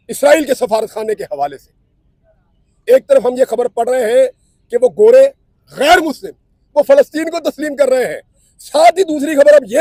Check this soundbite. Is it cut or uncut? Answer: uncut